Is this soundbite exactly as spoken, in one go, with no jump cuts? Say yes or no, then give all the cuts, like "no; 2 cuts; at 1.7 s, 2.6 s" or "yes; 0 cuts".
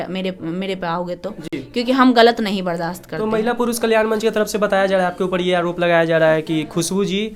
yes; 0 cuts